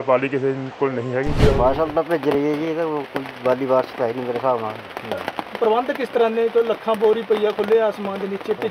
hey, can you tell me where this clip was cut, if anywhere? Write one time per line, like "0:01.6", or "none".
0:01.4